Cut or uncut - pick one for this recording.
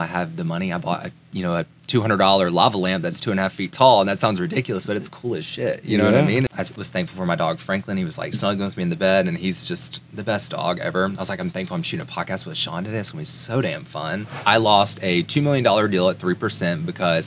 cut